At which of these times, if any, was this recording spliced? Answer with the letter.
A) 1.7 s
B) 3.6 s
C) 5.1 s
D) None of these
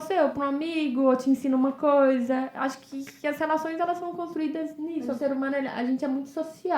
C